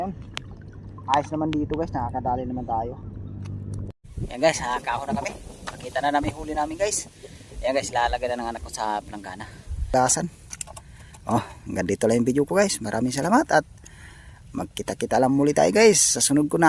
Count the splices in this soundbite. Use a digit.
2